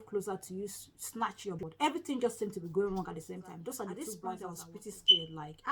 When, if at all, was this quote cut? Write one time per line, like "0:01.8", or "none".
0:01.6
0:04.5

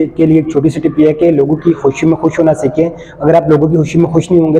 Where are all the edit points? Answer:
none

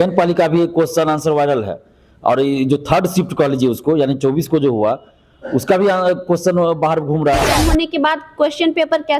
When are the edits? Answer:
0:07.6

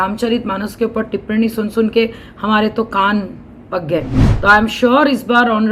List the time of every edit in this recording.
0:04.2

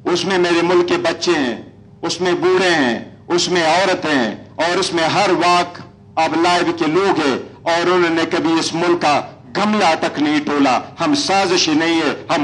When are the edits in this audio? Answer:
none

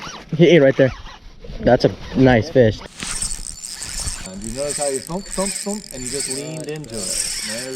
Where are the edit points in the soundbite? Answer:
0:02.8
0:04.3

